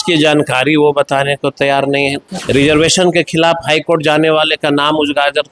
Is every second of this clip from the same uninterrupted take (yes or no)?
no